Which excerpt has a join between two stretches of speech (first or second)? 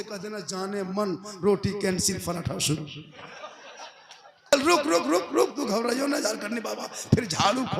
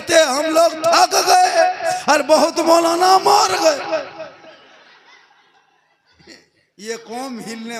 first